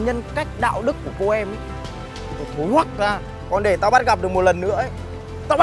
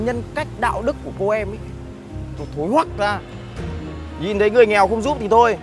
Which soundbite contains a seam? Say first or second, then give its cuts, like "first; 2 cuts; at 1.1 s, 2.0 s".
first; 1 cut; at 3.3 s